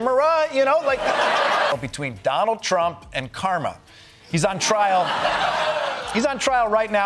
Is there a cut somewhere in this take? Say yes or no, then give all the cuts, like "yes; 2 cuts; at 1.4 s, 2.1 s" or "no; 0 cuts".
yes; 1 cut; at 1.7 s